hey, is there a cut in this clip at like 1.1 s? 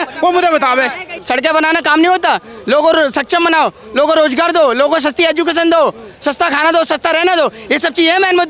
yes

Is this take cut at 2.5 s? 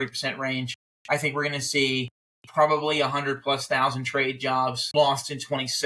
no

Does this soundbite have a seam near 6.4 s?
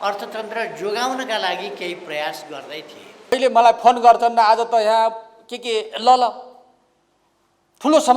no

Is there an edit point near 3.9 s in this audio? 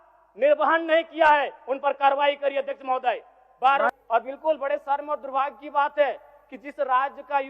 yes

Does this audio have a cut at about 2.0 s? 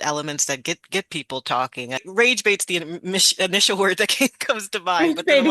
yes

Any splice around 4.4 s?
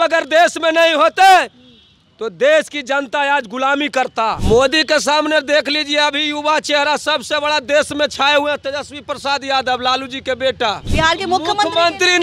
yes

